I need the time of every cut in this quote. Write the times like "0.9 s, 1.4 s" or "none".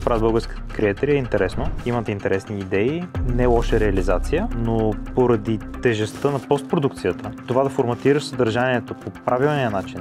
1.7 s, 3.2 s, 7.4 s

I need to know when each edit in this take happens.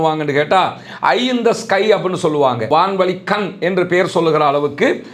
none

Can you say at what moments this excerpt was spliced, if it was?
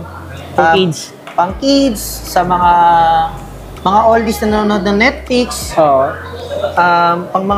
none

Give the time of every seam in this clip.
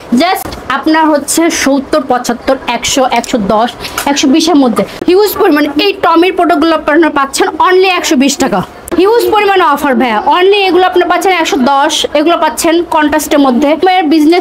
5.0 s, 8.8 s

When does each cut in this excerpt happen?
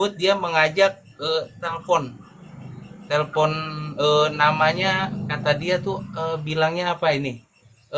none

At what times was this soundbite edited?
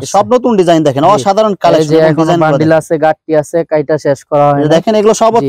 none

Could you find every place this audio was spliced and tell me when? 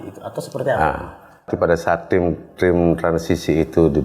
1.5 s

